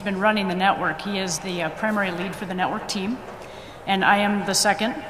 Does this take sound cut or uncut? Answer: cut